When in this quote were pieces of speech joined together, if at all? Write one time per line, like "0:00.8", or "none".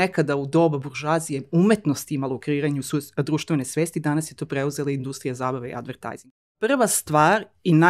0:06.4

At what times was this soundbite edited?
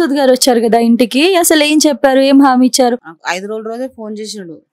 0:02.9

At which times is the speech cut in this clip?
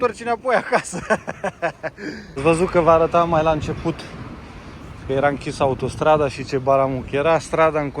0:02.3

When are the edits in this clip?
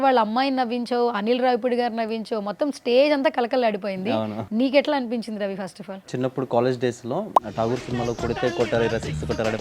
0:04.4
0:06.1

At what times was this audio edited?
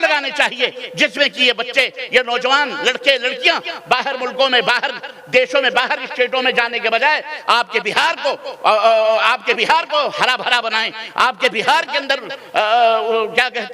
none

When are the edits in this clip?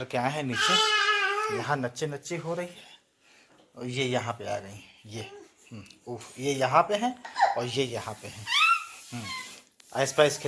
none

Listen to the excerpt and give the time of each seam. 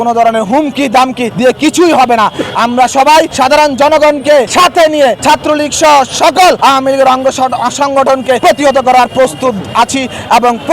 0:01.3
0:03.3
0:04.5
0:05.2
0:06.6
0:08.4

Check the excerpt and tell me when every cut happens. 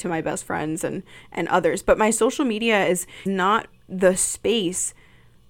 0:03.2

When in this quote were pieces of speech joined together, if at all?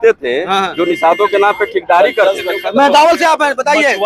none

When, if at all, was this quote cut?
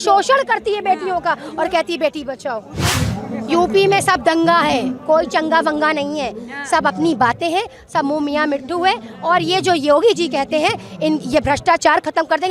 0:02.9

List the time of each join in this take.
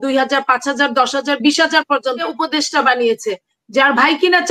0:02.2

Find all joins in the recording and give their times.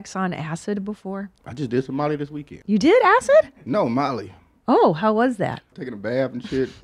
0:01.4
0:02.5
0:05.7

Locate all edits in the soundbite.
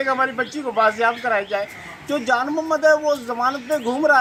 none

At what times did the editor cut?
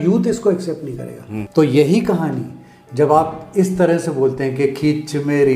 0:01.3

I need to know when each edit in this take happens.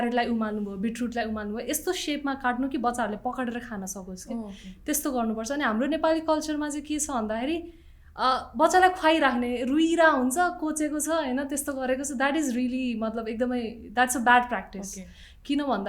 none

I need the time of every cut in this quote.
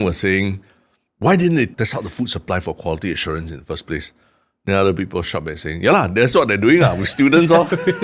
0:01.7

